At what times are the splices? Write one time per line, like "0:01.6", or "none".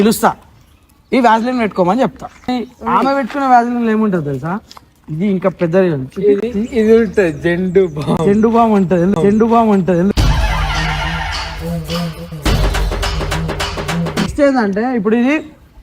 0:02.5
0:14.3